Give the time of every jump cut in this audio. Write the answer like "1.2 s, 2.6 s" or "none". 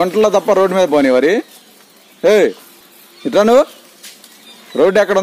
none